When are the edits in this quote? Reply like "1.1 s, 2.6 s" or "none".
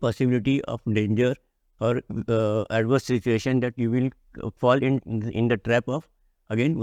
none